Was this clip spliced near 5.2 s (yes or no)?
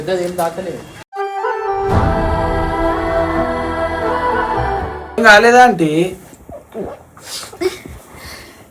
yes